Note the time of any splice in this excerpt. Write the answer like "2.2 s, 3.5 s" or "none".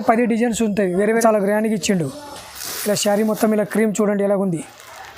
1.1 s